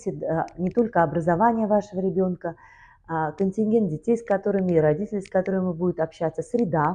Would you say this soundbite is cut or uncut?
uncut